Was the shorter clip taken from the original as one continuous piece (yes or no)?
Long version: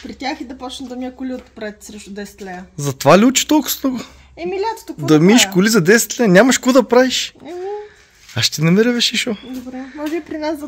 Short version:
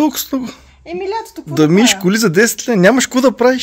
yes